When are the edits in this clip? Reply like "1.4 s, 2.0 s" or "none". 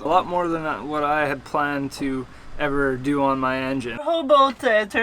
4.0 s

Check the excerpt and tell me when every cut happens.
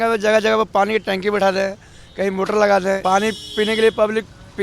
3.0 s

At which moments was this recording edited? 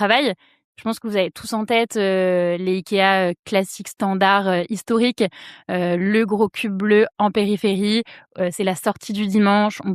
none

